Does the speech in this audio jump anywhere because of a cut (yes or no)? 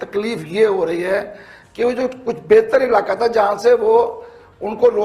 no